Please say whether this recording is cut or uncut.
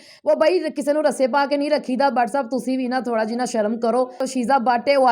cut